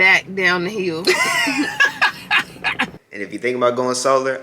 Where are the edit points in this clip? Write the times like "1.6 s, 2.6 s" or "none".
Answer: 3.1 s